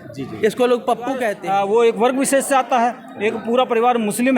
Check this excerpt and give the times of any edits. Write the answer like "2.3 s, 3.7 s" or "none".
1.4 s